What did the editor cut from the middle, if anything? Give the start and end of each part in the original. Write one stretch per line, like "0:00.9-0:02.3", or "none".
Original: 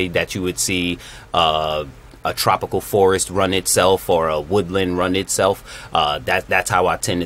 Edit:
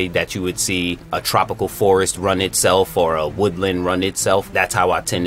0:01.1-0:02.2
0:05.6-0:06.4